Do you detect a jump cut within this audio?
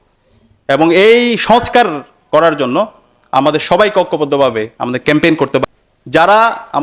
yes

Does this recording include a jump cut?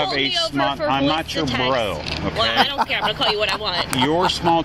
no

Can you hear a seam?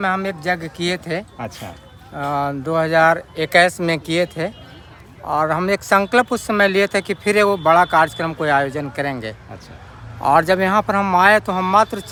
no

